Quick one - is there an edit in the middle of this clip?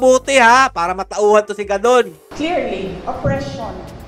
no; 0 cuts

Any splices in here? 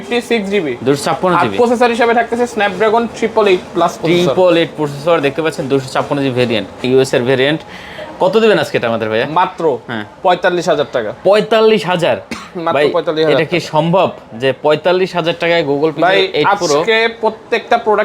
yes; 1 cut; at 6.8 s

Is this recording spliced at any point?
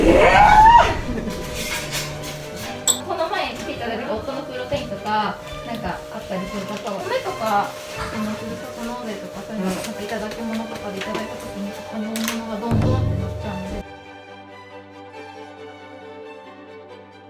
no; 0 cuts

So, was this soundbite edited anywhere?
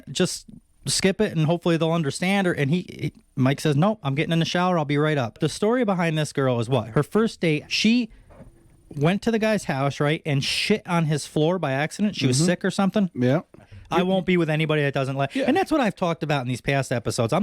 yes; 4 cuts; at 5.4 s, 6.9 s, 7.7 s, 13.8 s

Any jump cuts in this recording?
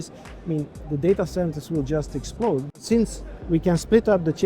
yes; 1 cut; at 2.8 s

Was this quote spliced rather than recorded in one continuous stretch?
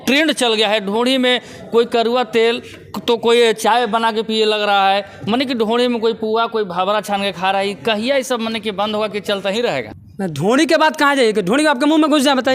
yes; 1 cut; at 9.9 s

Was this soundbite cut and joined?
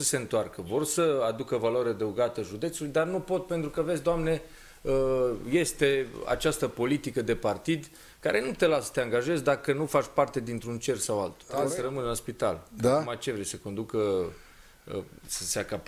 yes; 1 cut; at 11.4 s

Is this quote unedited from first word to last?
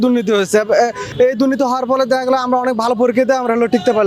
yes; 0 cuts

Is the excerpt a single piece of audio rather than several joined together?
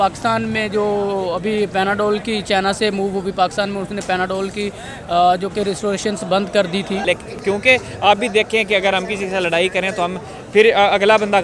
no; 1 cut; at 7.0 s

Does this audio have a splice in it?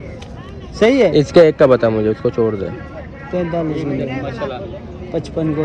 no; 0 cuts

